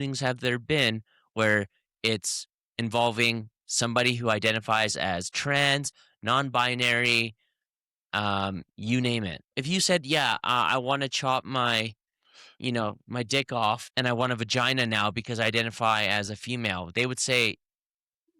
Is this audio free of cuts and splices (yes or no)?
no